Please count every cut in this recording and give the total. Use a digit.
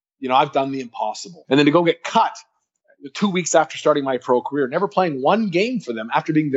1